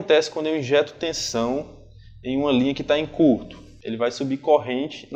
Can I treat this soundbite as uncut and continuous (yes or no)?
yes